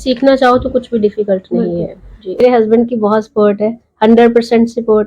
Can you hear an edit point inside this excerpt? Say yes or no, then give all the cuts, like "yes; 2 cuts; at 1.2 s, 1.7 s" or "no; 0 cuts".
yes; 1 cut; at 2.4 s